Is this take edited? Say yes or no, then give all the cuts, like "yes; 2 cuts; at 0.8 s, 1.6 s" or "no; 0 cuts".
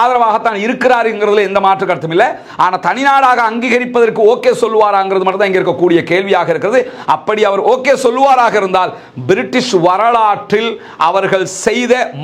no; 0 cuts